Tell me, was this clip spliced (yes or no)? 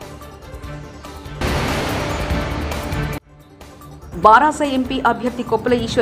yes